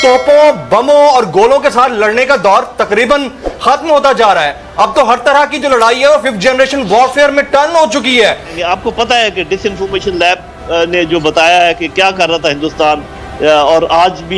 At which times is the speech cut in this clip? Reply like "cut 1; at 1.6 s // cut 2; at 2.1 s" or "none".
cut 1; at 8.6 s